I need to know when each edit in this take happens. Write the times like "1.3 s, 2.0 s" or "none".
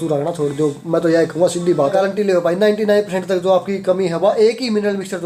1.9 s

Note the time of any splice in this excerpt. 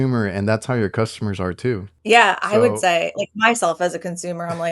1.9 s

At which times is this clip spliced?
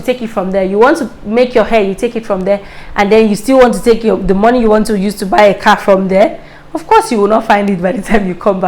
none

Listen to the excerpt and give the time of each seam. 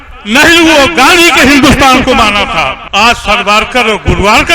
2.8 s

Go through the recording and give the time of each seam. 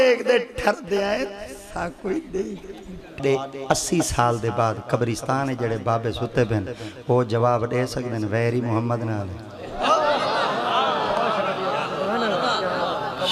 3.2 s

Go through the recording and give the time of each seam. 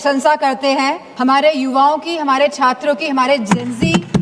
1.1 s

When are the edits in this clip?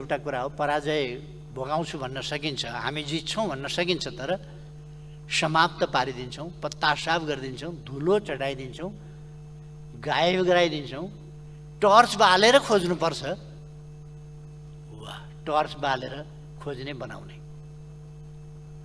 none

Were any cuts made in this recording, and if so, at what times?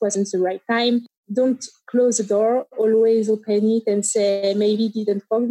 1.2 s

